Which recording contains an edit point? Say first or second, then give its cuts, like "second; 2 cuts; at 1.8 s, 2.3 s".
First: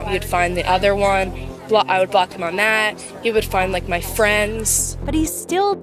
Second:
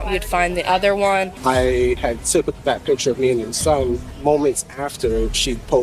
second; 3 cuts; at 1.3 s, 2.0 s, 4.1 s